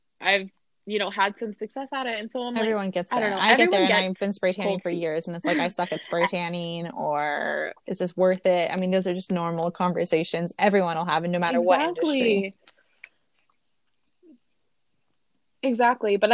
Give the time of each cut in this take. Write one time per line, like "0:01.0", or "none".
none